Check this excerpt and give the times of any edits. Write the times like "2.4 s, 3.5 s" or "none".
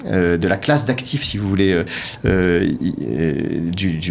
none